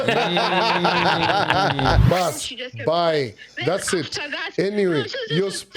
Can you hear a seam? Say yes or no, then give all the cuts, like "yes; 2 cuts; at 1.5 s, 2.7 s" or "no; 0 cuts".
yes; 1 cut; at 2.0 s